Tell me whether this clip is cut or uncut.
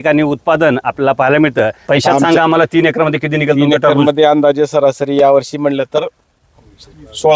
cut